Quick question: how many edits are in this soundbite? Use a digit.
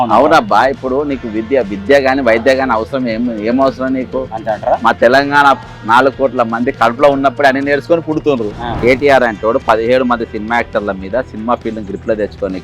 1